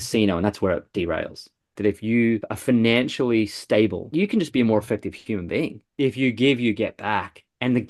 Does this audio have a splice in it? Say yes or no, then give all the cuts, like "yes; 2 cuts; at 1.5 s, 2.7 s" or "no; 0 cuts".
yes; 4 cuts; at 1.7 s, 2.5 s, 4.0 s, 5.8 s